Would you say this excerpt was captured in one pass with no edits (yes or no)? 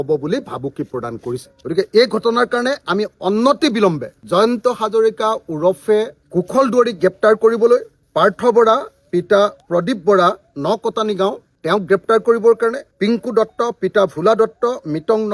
no